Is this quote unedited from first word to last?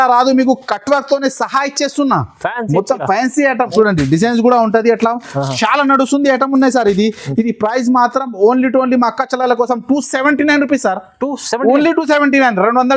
no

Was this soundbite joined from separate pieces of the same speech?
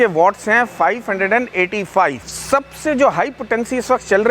yes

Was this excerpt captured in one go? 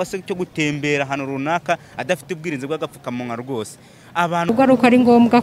no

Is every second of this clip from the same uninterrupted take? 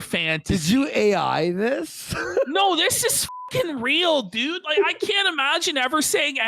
yes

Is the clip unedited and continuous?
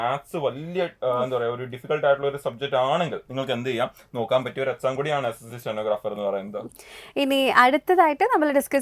yes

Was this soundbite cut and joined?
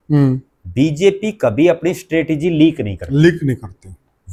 no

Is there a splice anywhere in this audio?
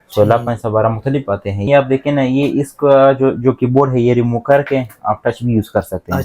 yes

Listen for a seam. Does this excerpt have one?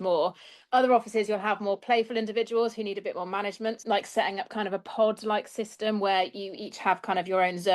yes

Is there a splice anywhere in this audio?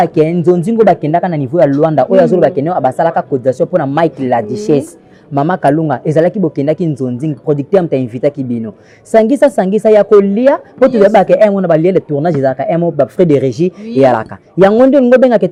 no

